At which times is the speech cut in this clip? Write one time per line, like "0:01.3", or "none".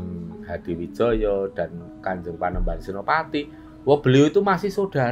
none